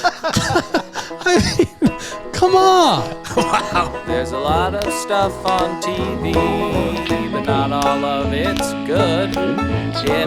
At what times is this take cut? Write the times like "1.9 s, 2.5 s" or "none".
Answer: 4.0 s